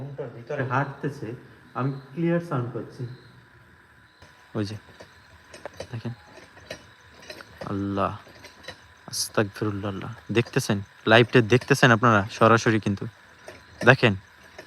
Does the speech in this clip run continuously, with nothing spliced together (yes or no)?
no